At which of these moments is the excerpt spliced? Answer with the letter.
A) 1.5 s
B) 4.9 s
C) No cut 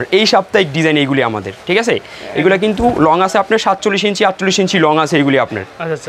C